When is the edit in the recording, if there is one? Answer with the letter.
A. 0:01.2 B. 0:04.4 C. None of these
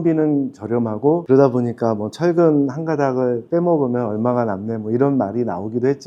A